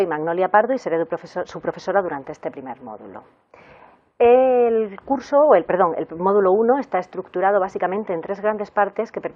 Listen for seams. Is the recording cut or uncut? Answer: uncut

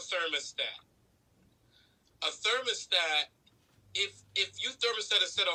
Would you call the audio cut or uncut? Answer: uncut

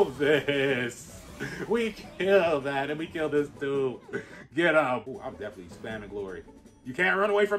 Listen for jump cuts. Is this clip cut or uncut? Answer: cut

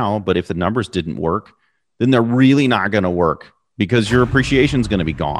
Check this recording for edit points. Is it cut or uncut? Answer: uncut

